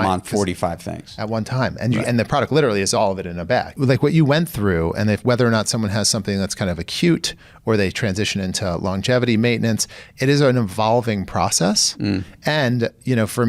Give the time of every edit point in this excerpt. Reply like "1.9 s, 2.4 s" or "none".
3.7 s